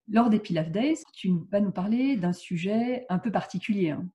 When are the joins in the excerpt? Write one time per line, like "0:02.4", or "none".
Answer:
0:01.1

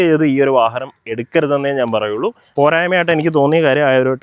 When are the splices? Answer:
0:02.4

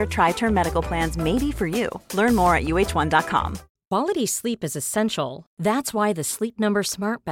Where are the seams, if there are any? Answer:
0:03.7

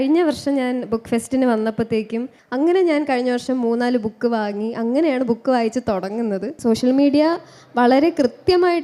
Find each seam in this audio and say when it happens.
0:02.4
0:06.5

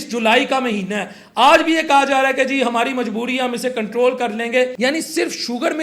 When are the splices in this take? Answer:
0:04.7

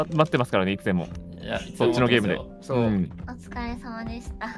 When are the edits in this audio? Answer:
none

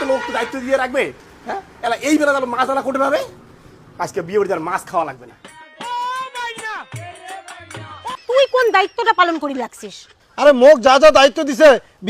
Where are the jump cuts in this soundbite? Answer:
0:08.2

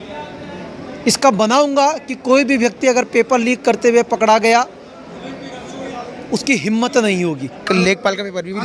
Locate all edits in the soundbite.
0:07.6

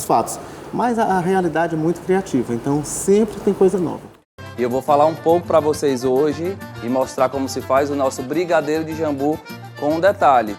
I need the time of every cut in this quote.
0:04.2

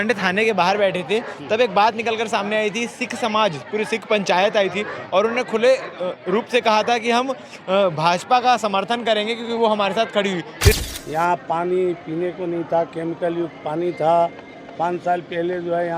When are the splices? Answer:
0:10.8

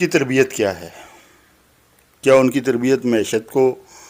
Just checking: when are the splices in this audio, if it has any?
none

